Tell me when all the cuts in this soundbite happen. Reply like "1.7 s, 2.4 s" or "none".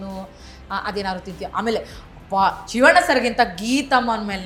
none